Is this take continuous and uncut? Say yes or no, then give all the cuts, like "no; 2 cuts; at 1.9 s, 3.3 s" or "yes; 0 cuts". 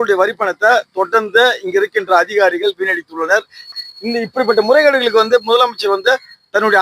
no; 1 cut; at 3.8 s